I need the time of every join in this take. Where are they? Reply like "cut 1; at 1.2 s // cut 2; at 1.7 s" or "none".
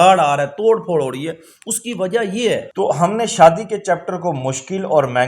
cut 1; at 2.7 s